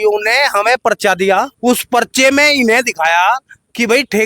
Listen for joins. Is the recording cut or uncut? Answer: cut